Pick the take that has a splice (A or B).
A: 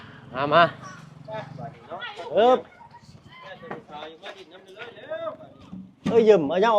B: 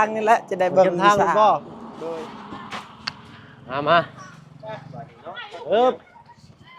B